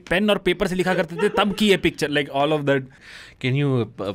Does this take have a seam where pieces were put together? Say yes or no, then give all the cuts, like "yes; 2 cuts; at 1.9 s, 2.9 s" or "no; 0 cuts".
yes; 1 cut; at 3.0 s